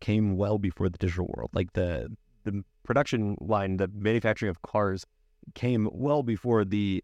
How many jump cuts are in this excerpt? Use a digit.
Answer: 0